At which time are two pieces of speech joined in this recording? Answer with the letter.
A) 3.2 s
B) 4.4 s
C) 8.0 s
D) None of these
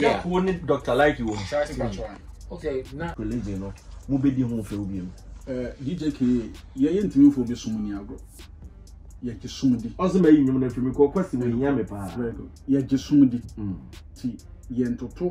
A